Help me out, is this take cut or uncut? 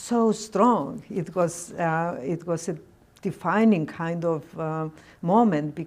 uncut